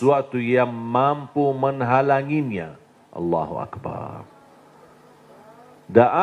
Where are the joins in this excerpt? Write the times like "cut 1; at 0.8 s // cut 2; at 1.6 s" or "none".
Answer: none